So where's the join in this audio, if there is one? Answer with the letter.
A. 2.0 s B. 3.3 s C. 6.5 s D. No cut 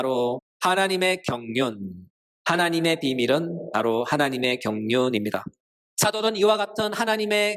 D